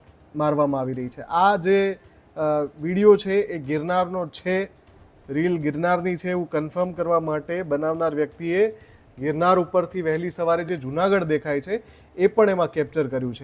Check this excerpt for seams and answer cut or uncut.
uncut